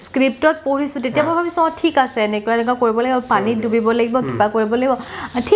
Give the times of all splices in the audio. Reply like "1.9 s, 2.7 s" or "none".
none

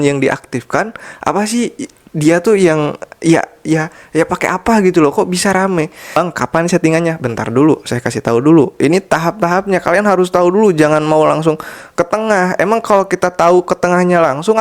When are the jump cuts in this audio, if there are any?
6.2 s

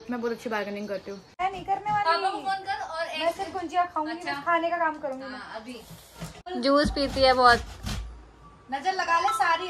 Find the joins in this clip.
1.3 s, 6.3 s

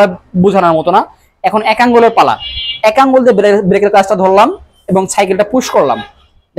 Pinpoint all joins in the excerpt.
none

